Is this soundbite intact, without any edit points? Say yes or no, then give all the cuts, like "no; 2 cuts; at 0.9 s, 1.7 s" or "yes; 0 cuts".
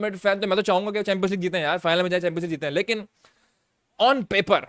yes; 0 cuts